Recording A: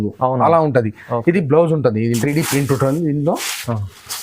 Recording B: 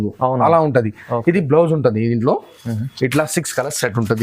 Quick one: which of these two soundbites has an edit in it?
A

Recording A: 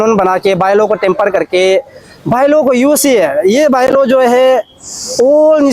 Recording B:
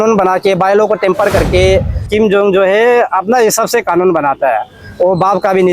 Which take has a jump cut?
B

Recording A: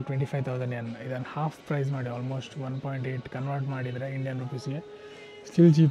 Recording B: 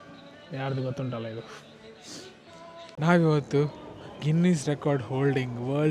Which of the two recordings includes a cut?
B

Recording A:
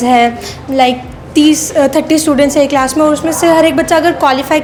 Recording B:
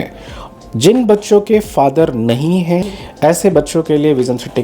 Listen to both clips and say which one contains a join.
B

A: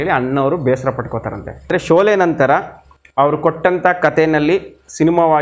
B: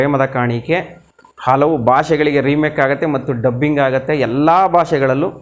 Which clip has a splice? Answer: A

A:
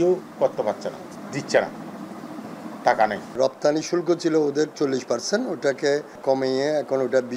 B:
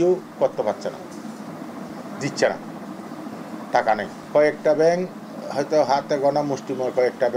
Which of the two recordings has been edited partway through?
A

